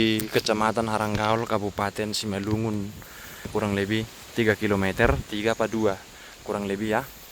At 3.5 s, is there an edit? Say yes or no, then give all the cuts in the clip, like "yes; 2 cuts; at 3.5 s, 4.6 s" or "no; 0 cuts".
yes; 1 cut; at 3.5 s